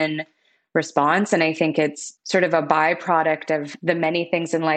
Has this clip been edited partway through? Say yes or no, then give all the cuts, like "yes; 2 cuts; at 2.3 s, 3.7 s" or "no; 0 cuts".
yes; 2 cuts; at 2.0 s, 3.7 s